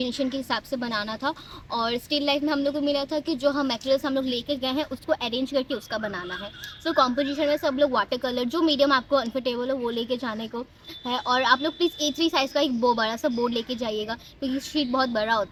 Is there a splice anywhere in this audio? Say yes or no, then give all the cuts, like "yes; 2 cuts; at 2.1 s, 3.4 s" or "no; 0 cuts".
no; 0 cuts